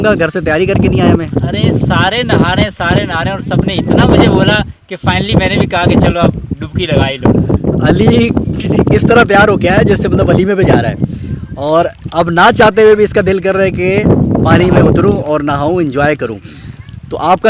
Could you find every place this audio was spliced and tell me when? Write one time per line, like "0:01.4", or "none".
none